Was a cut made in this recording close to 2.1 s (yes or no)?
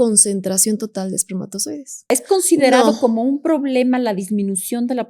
yes